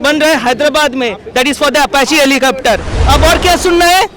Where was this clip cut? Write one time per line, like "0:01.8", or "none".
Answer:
0:02.9

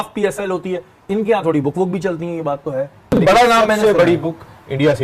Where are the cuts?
0:03.1

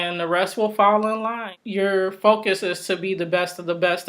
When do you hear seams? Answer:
0:01.4

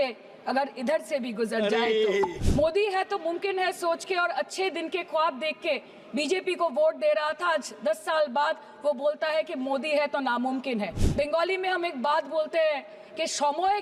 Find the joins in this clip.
0:02.4
0:11.0

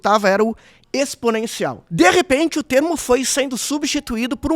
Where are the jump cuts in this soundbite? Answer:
0:01.8

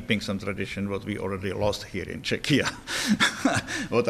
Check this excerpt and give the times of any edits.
none

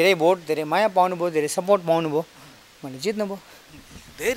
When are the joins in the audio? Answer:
none

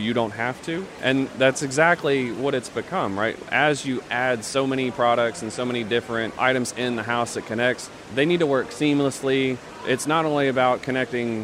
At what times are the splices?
0:01.0
0:06.3
0:07.9
0:09.7

